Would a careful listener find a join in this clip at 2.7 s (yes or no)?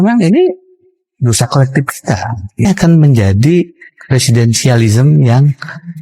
yes